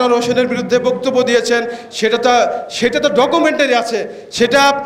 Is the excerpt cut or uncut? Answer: uncut